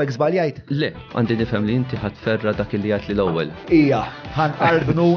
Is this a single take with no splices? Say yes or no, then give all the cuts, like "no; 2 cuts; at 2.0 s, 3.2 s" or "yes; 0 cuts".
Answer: no; 2 cuts; at 1.1 s, 4.2 s